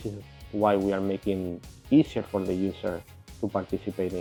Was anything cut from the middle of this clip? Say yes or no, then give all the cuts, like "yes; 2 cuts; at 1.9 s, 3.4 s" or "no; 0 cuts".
no; 0 cuts